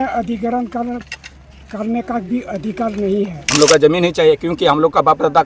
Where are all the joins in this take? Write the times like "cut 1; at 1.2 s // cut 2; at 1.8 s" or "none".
cut 1; at 3.4 s